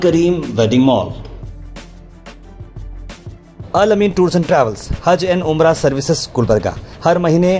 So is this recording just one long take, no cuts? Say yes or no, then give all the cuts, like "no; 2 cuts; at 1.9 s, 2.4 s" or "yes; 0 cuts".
yes; 0 cuts